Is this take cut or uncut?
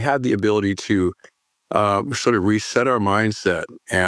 uncut